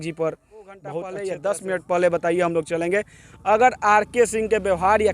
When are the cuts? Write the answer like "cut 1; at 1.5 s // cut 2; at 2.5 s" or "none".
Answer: cut 1; at 1.1 s